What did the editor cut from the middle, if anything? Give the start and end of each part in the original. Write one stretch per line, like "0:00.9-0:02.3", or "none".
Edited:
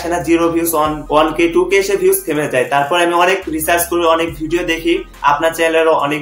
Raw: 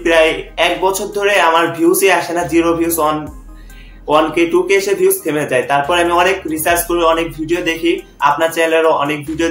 0:03.2-0:04.0